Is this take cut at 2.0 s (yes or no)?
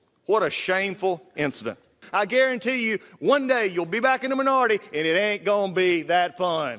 yes